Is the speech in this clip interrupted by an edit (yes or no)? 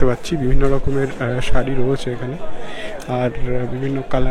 no